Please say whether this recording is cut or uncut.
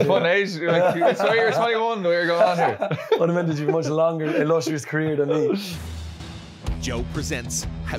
cut